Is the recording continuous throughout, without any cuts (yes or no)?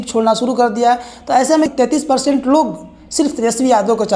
no